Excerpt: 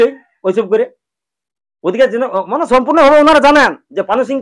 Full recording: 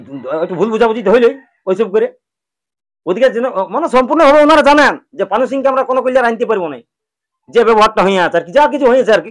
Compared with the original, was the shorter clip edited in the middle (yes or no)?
no